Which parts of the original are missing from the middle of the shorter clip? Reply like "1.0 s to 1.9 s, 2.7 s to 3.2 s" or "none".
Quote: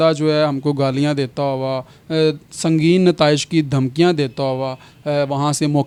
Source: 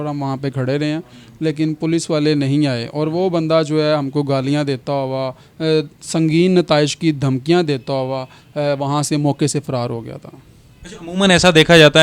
none